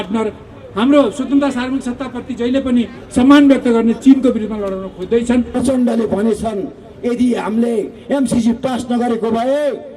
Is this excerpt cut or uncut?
cut